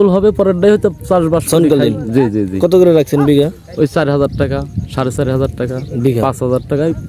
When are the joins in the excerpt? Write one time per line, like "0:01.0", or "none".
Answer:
none

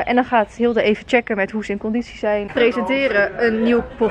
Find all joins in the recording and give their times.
0:02.5

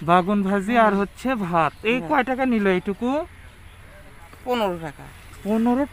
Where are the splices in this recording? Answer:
none

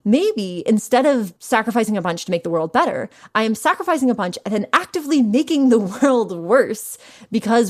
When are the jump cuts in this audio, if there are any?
0:01.4

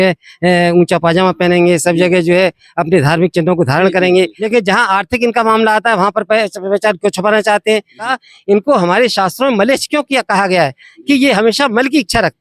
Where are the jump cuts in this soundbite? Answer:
0:04.4
0:08.1

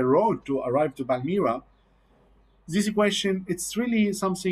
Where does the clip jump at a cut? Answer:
none

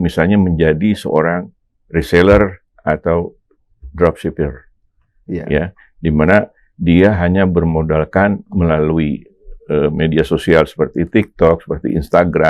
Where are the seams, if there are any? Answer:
none

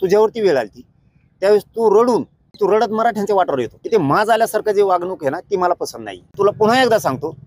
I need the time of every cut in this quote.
0:02.4
0:03.8
0:06.3

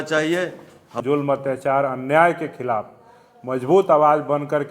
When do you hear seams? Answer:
0:01.0

